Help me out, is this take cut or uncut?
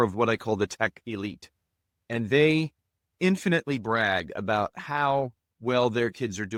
uncut